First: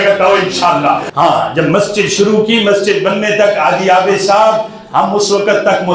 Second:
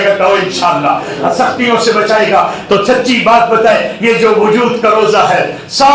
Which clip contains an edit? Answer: first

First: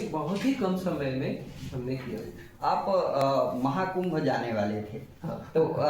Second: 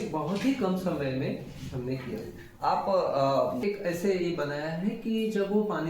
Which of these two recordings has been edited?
second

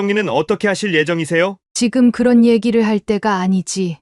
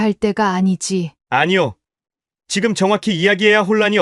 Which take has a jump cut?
first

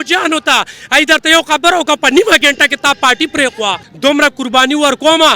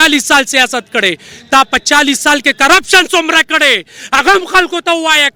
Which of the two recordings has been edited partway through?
first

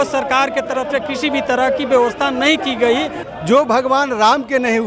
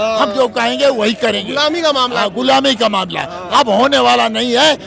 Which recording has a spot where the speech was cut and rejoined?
first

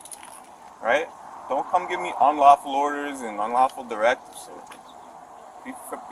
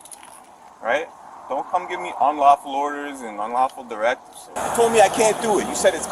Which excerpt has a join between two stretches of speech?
second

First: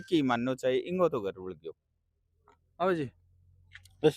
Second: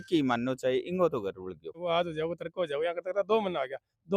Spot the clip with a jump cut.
second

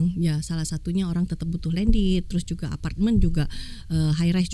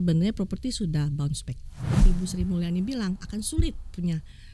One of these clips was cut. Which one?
second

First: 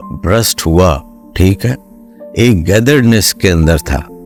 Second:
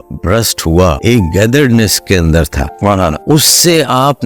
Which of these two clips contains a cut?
second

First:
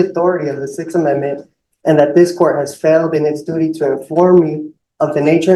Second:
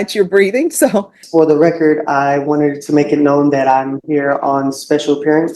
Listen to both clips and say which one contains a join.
second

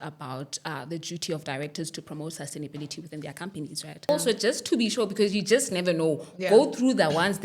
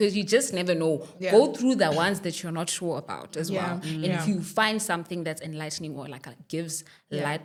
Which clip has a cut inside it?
first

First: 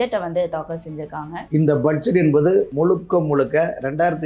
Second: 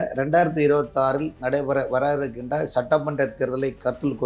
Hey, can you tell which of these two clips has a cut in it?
first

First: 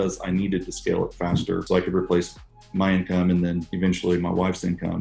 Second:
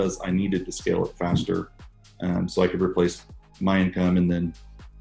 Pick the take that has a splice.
first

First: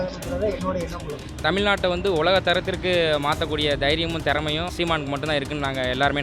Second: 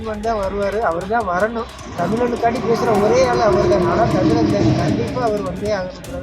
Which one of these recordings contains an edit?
first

